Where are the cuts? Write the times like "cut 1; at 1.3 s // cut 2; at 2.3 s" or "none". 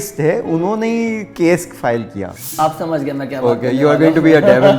cut 1; at 2.4 s